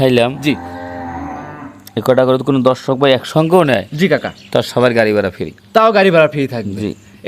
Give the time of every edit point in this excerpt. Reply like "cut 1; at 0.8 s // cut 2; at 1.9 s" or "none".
none